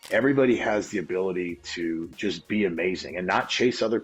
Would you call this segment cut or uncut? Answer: uncut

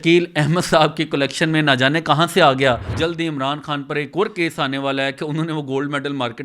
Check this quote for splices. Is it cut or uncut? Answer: cut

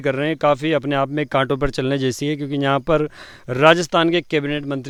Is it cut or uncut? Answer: uncut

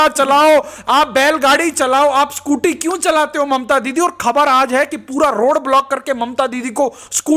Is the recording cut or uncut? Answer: uncut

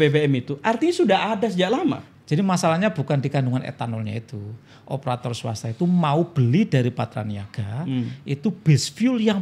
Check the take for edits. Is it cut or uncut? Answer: cut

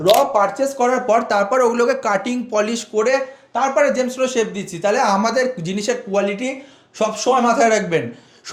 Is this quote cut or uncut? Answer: uncut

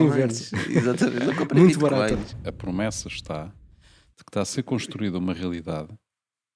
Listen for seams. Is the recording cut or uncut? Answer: cut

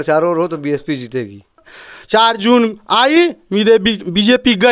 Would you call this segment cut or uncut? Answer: cut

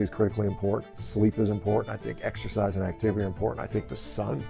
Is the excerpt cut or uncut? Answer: cut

